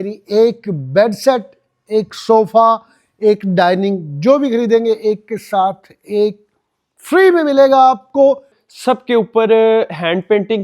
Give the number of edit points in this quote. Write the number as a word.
one